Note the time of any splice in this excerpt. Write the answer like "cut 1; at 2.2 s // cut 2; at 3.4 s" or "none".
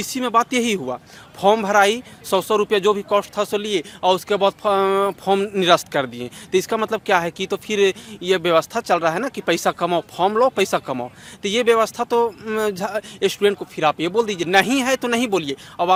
none